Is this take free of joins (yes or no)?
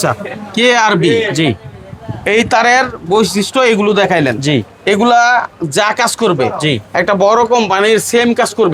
yes